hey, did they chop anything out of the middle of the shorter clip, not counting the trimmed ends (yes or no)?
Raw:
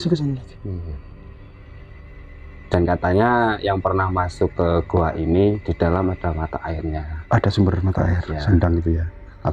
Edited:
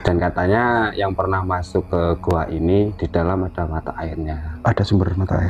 no